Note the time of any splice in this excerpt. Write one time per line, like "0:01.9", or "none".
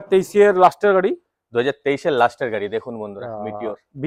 none